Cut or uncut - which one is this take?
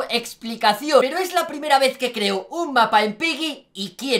cut